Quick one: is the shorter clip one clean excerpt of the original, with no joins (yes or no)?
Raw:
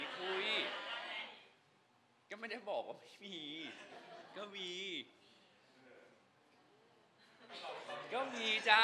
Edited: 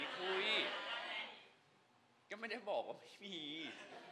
yes